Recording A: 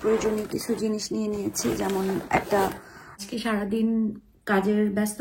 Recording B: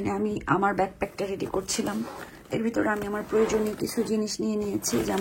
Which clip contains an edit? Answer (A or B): A